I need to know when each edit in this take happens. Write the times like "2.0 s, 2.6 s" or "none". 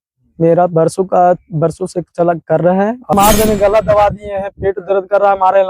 3.1 s